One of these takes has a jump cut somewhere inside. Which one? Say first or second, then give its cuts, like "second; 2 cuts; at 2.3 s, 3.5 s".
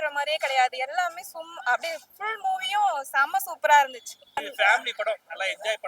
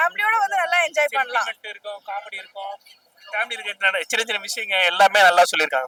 first; 1 cut; at 4.5 s